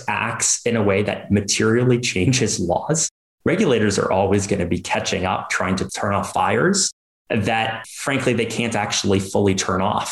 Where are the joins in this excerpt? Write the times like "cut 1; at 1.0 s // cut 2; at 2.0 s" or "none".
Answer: none